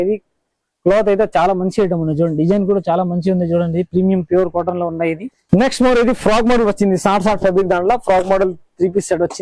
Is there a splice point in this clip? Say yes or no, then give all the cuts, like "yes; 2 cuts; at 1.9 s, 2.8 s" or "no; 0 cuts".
yes; 1 cut; at 5.3 s